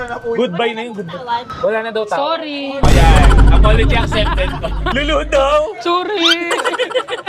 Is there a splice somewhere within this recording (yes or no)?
yes